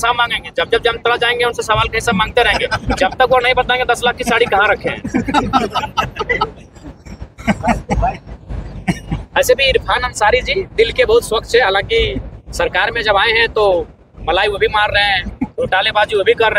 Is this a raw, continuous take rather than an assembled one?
yes; 0 cuts

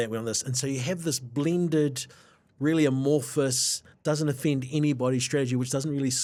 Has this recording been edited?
no; 0 cuts

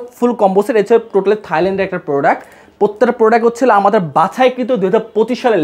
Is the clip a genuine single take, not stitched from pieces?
yes; 0 cuts

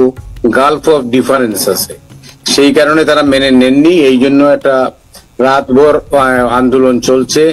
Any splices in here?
no; 0 cuts

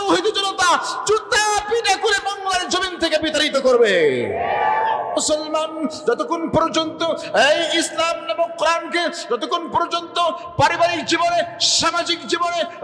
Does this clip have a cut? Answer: yes; 1 cut; at 5.2 s

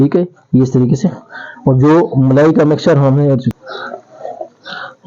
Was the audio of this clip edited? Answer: yes; 1 cut; at 3.5 s

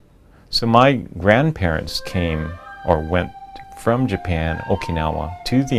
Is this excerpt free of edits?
yes; 0 cuts

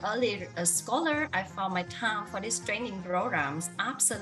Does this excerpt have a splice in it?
no; 0 cuts

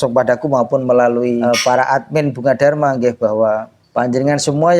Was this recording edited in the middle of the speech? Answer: yes; 2 cuts; at 1.4 s, 3.8 s

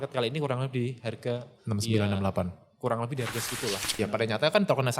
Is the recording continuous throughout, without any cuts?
no; 1 cut; at 3.9 s

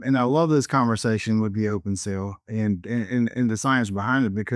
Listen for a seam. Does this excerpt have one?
no; 0 cuts

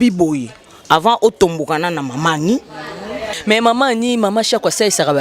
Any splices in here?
yes; 1 cut; at 3.4 s

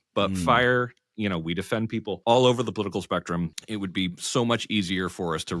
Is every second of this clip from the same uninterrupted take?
no; 2 cuts; at 2.2 s, 3.6 s

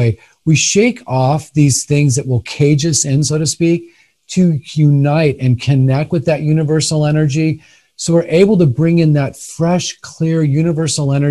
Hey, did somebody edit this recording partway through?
no; 0 cuts

